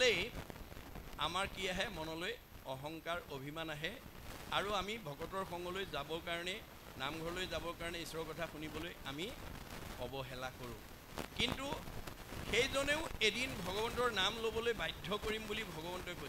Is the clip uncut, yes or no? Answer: yes